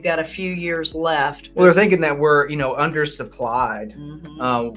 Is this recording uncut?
no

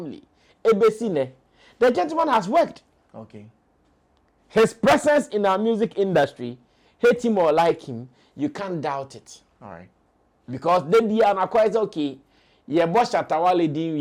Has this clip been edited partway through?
no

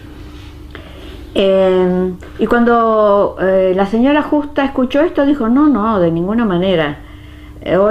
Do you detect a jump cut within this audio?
no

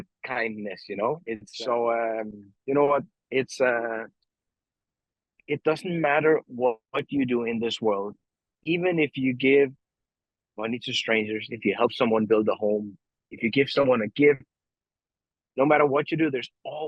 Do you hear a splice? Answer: yes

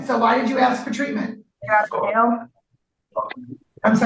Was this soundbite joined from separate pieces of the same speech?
yes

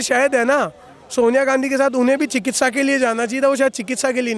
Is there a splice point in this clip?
no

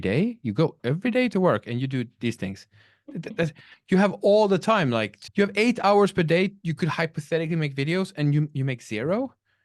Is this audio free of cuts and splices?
no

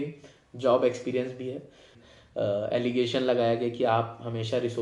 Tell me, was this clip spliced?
yes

